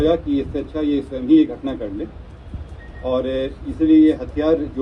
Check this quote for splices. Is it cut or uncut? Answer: uncut